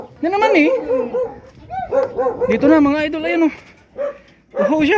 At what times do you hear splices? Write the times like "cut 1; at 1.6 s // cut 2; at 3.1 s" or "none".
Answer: none